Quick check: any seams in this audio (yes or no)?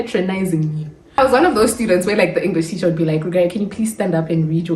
yes